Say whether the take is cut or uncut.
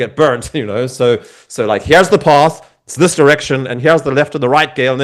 uncut